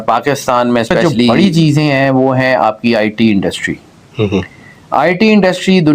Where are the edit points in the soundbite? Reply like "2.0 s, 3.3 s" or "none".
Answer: 1.3 s